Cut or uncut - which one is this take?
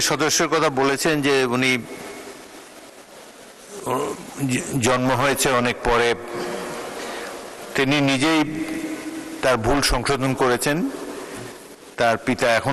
uncut